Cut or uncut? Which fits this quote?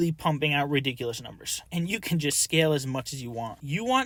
uncut